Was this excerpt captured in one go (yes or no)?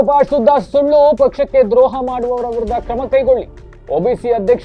yes